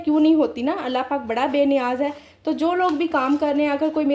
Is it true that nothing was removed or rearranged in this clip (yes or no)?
yes